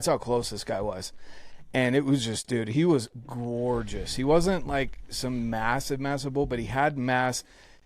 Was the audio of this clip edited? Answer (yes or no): no